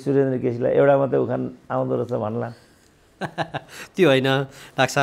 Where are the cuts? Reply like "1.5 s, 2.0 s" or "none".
none